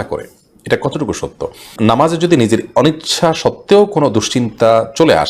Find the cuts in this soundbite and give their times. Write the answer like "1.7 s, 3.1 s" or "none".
1.7 s

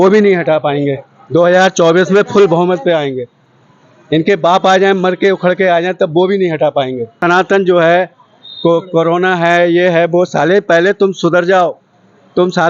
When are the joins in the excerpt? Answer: 7.1 s

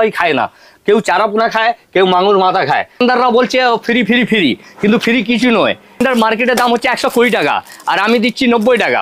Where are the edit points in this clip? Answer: 3.0 s, 6.0 s

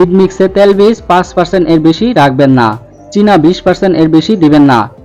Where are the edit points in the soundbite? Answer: none

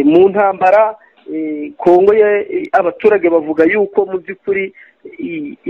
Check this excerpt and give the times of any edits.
none

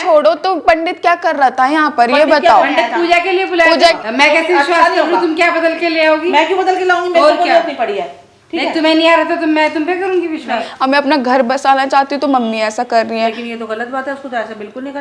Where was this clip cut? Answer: 3.8 s, 10.7 s

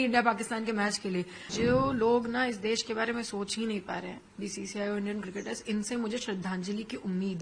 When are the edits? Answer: 1.4 s

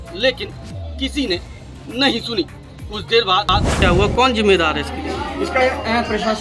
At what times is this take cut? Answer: 3.8 s

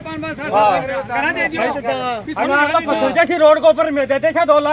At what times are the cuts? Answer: none

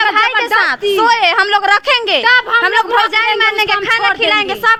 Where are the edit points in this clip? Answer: none

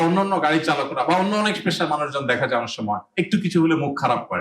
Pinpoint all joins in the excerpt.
3.1 s

